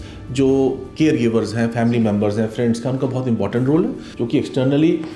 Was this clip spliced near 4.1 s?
yes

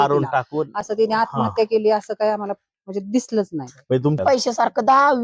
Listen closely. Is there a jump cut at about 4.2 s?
yes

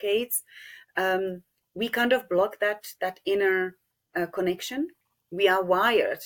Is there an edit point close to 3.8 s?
no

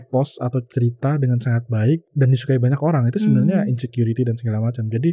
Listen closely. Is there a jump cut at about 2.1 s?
yes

